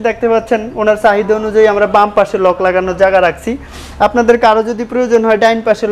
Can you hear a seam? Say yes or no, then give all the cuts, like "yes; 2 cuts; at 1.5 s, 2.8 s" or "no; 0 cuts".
no; 0 cuts